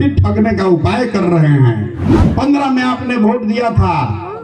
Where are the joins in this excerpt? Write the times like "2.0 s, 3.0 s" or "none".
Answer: none